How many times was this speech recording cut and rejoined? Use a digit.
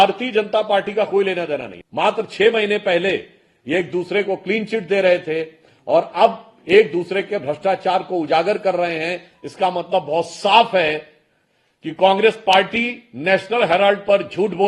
1